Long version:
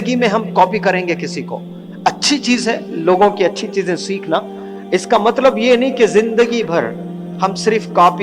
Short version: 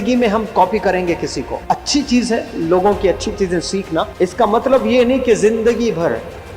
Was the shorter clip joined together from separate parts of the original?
yes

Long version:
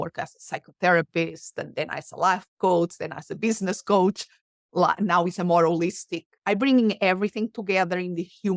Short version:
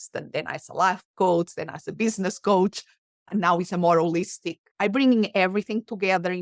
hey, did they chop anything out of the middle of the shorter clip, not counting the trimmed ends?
yes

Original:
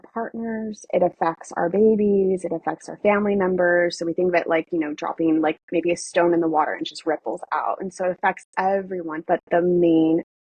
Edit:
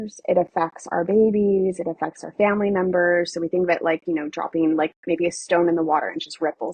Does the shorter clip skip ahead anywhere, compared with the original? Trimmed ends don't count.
no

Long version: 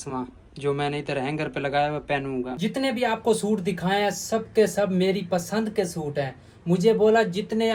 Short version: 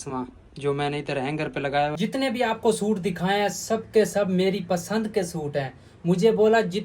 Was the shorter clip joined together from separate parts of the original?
yes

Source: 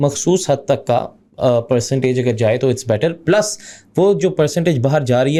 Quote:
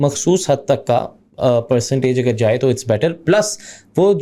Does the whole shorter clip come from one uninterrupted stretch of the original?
yes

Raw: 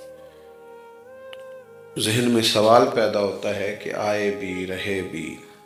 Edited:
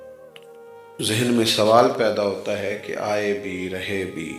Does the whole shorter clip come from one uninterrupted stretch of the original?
no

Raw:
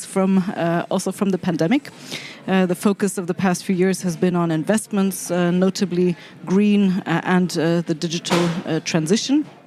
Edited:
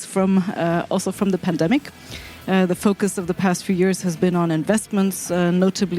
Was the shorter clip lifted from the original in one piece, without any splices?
yes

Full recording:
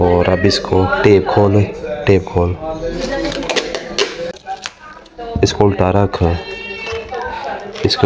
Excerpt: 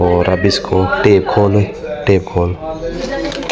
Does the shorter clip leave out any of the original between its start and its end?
no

